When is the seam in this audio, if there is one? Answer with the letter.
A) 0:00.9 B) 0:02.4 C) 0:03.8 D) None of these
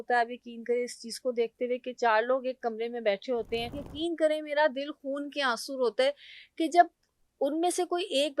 C